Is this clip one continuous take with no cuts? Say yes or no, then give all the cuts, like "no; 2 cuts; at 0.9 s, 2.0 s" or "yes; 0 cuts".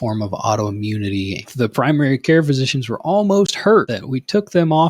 no; 2 cuts; at 1.5 s, 4.0 s